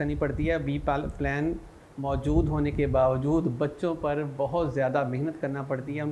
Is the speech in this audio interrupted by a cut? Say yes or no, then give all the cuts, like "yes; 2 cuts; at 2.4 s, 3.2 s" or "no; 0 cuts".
no; 0 cuts